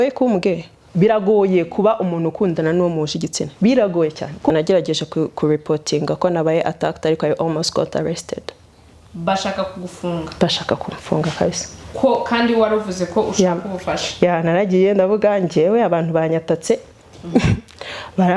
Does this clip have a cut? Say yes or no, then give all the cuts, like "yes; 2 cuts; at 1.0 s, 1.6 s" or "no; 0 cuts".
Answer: yes; 1 cut; at 4.5 s